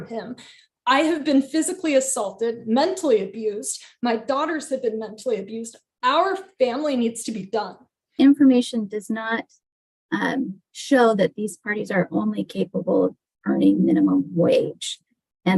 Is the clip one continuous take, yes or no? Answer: no